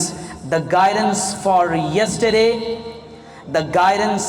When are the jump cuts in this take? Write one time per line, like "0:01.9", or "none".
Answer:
none